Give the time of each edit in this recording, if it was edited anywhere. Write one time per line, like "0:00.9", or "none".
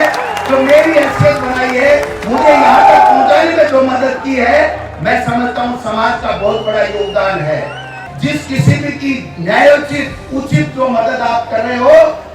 0:08.0